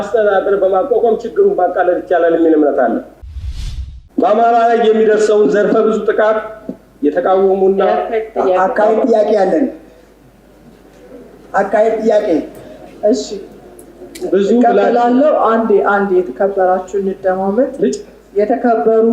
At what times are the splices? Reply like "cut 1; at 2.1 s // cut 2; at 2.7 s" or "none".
cut 1; at 3.6 s